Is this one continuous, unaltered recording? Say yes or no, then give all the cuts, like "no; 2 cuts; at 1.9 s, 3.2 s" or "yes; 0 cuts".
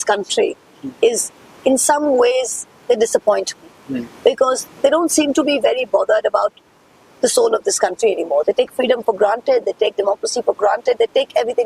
yes; 0 cuts